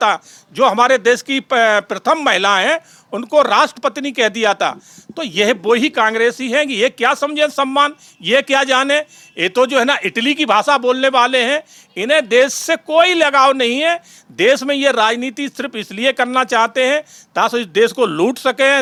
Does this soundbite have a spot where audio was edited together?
no; 0 cuts

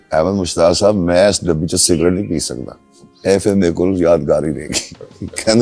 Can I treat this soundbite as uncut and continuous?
yes; 0 cuts

